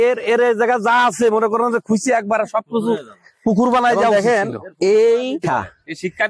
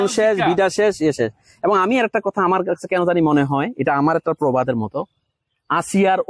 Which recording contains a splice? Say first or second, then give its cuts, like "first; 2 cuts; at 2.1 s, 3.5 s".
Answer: first; 1 cut; at 5.4 s